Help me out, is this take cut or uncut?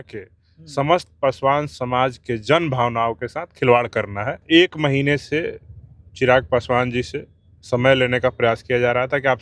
cut